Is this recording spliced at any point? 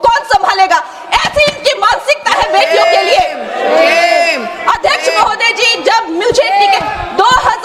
no; 0 cuts

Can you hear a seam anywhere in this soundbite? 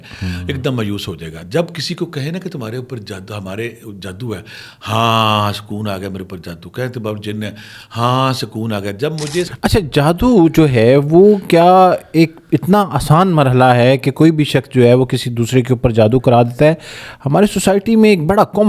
yes; 1 cut; at 9.5 s

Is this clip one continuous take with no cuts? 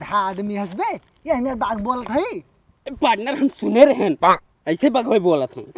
yes; 0 cuts

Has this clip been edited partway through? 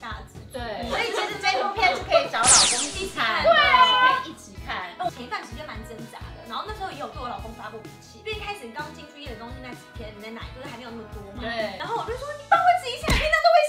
yes; 1 cut; at 5.1 s

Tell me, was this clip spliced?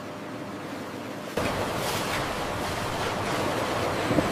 yes; 1 cut; at 1.4 s

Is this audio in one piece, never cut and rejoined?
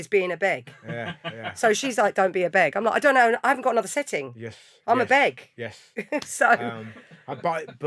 yes; 0 cuts

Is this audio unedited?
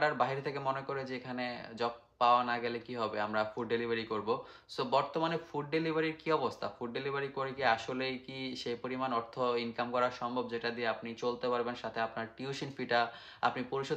yes; 0 cuts

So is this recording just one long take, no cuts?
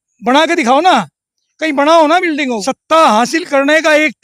no; 1 cut; at 2.7 s

